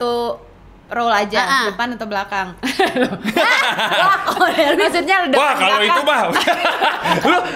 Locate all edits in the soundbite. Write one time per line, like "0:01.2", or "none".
none